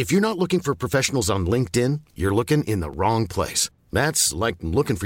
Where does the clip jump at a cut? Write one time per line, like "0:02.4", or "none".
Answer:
none